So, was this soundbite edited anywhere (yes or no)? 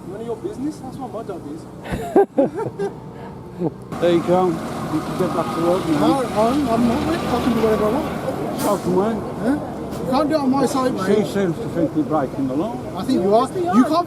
yes